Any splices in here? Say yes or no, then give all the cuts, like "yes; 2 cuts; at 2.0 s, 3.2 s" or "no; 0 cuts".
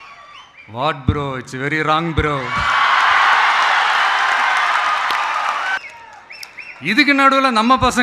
yes; 1 cut; at 5.8 s